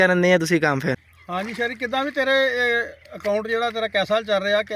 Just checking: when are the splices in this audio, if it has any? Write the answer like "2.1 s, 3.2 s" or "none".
1.1 s

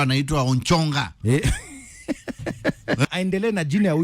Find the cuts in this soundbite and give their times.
3.0 s

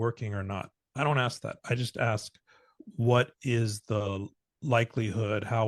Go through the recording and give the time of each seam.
none

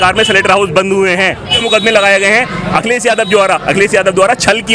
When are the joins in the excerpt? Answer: 1.6 s

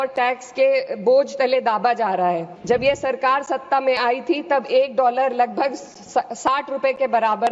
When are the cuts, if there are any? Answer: 2.5 s

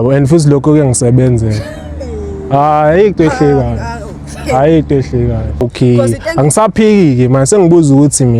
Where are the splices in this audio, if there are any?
5.6 s

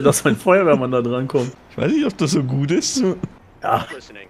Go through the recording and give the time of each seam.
1.6 s, 3.3 s

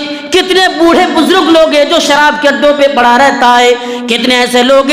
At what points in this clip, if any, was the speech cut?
none

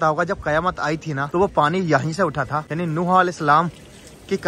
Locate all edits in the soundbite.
1.2 s, 2.6 s

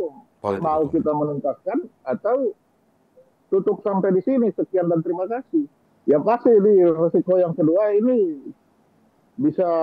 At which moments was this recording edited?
5.8 s

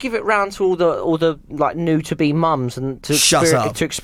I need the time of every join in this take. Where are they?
none

